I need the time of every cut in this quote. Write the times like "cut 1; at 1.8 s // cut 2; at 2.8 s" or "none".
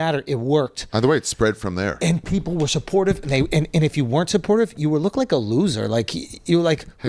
none